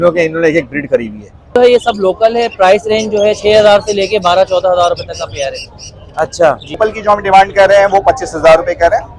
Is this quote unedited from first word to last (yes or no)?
no